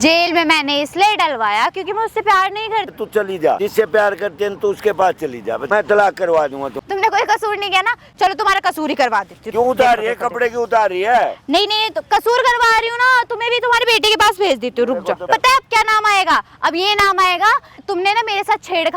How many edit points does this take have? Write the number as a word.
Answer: six